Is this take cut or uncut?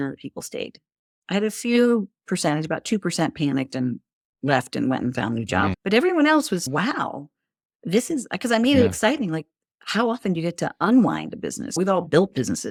uncut